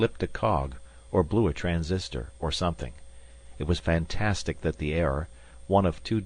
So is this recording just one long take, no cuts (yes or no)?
no